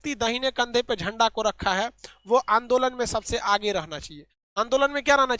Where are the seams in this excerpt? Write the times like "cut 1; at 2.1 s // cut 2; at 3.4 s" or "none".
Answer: none

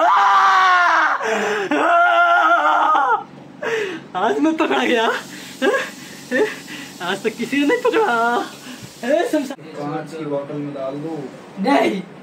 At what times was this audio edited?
cut 1; at 9.5 s

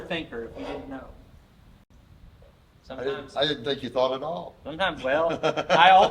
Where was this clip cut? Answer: none

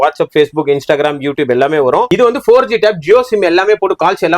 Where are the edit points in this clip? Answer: cut 1; at 2.1 s

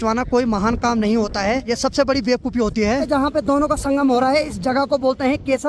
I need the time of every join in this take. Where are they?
cut 1; at 1.7 s // cut 2; at 3.0 s

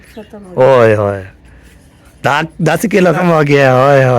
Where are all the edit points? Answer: cut 1; at 3.2 s

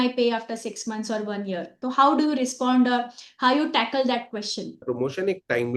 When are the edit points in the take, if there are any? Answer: cut 1; at 1.8 s // cut 2; at 4.8 s

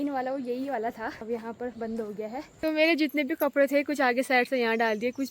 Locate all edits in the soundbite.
cut 1; at 1.2 s // cut 2; at 2.5 s

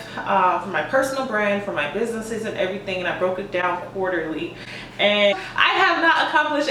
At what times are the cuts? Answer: cut 1; at 5.3 s

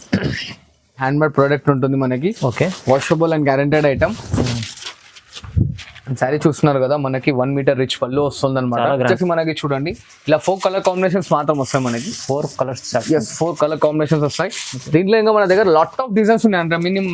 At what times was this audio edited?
cut 1; at 1.0 s // cut 2; at 9.0 s

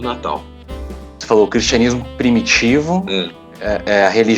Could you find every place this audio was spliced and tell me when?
cut 1; at 1.1 s

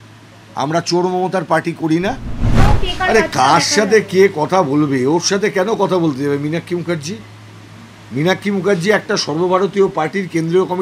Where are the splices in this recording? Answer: cut 1; at 2.7 s

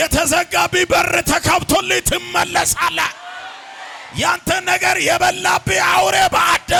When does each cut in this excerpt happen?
none

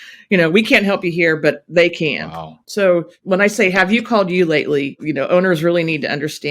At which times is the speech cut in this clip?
cut 1; at 2.6 s // cut 2; at 3.1 s // cut 3; at 5.0 s

